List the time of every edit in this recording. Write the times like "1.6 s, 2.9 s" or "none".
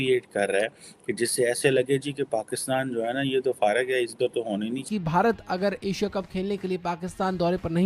4.8 s